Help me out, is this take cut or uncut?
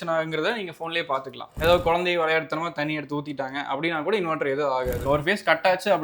cut